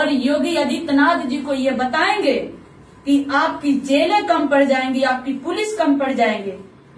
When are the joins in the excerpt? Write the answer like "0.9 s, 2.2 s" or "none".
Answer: none